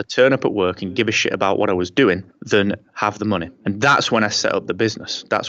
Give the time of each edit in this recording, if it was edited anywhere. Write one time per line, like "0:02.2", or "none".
0:02.3
0:03.5